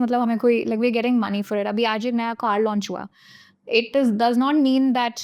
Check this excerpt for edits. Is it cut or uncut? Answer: uncut